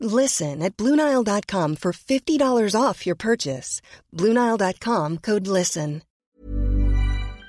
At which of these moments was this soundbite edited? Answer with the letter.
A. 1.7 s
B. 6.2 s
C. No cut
B